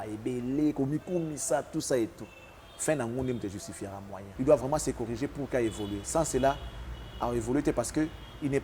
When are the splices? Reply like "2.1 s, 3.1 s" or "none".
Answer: 4.2 s